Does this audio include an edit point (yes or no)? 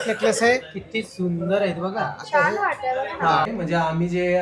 yes